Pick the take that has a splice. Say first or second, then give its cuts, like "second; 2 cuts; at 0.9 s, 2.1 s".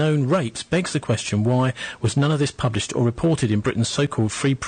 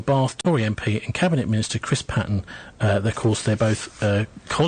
first; 1 cut; at 1.9 s